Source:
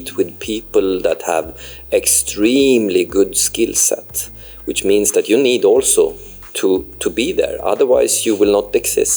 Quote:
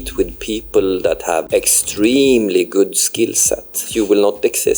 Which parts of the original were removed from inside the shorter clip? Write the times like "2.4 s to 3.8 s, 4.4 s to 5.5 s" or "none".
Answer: 1.5 s to 1.9 s, 4.3 s to 8.2 s